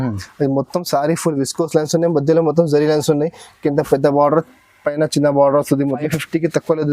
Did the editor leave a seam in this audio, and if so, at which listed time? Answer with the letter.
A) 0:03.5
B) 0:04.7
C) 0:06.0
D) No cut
C